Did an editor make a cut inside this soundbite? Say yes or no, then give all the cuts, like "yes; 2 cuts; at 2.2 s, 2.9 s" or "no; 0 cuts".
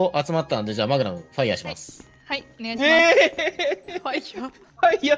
no; 0 cuts